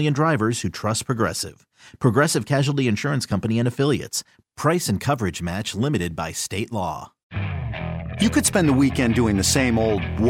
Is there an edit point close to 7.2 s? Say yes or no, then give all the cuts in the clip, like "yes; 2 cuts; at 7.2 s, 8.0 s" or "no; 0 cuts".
yes; 1 cut; at 7.2 s